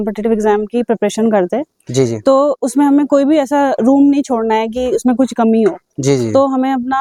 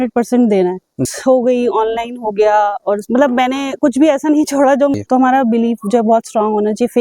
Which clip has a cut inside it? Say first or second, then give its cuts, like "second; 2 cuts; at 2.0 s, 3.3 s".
second; 2 cuts; at 1.0 s, 5.0 s